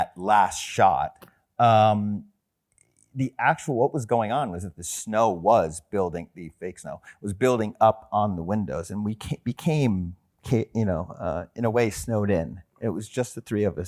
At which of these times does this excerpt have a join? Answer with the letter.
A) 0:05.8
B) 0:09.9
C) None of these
C